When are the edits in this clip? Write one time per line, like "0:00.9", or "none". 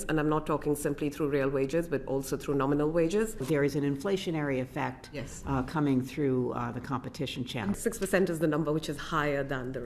0:03.4
0:07.7